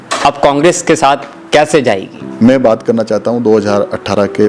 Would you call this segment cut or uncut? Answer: cut